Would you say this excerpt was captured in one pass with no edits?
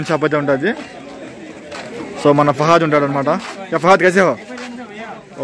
yes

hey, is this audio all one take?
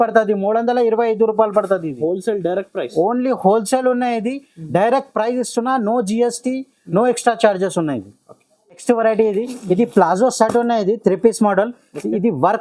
yes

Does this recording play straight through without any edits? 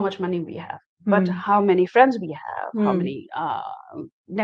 yes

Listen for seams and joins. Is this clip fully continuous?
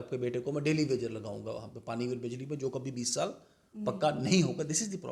yes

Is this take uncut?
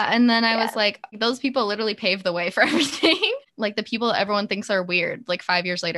no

